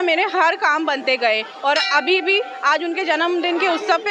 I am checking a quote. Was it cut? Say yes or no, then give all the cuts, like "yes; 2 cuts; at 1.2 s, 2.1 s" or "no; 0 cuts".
no; 0 cuts